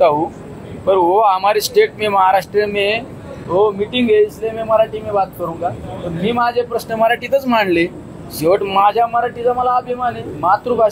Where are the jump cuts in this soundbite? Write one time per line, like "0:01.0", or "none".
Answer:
none